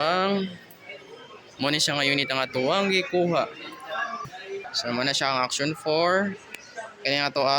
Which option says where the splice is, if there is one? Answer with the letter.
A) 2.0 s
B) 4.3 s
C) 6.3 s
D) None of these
B